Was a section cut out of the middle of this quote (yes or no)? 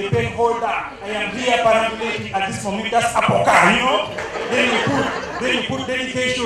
no